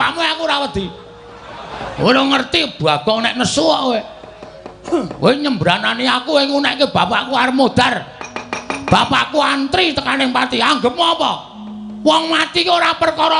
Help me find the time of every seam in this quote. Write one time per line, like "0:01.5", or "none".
0:01.8